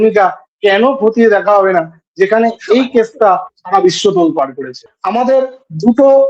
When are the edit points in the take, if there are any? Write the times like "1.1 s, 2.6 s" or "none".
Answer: 4.9 s